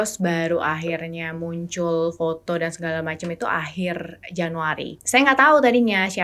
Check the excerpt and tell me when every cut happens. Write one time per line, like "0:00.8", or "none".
0:05.0